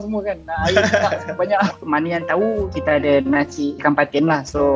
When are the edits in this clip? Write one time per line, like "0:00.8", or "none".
0:01.8
0:02.7
0:03.8